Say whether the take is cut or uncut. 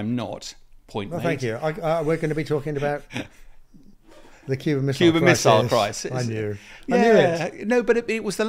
uncut